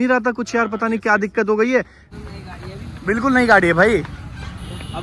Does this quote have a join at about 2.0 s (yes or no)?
yes